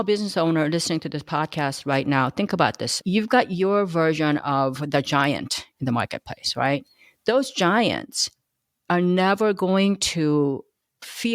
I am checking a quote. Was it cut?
yes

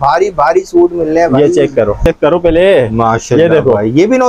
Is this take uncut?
no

